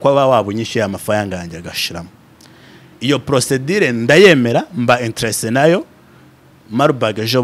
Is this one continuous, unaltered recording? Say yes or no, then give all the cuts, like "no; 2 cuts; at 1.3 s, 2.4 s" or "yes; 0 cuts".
yes; 0 cuts